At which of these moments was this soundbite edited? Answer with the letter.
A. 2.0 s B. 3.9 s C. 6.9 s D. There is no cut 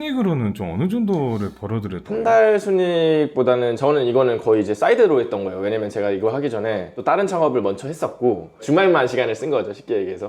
A